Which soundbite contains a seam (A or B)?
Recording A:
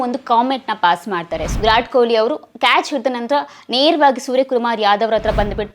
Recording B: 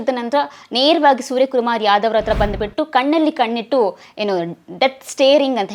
A